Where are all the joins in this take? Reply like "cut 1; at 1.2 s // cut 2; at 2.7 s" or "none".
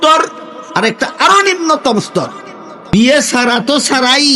cut 1; at 2.9 s